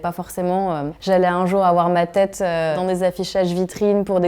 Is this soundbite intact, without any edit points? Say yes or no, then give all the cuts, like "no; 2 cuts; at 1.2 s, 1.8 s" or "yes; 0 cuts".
no; 1 cut; at 0.9 s